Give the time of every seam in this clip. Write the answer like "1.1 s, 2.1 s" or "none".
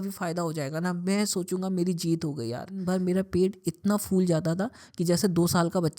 2.8 s